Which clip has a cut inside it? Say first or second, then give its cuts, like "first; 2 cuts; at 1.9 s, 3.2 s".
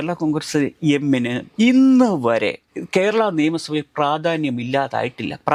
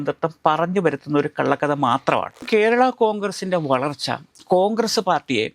second; 1 cut; at 2.4 s